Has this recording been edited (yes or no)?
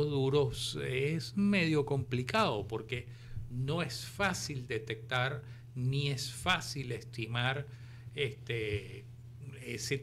no